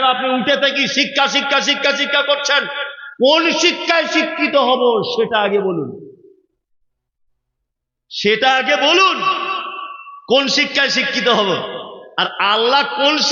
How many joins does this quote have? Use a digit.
0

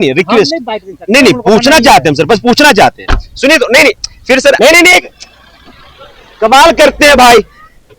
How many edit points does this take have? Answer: 1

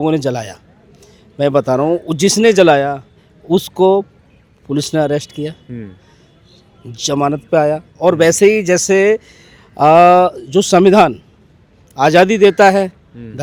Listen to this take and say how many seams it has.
0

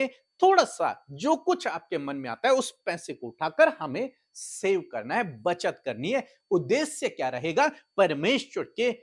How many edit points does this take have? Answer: 0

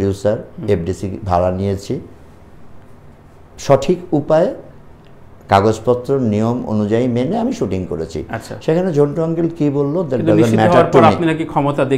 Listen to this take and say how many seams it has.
0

